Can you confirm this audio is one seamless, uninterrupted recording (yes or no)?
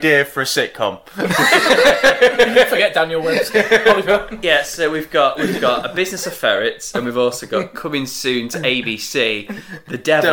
yes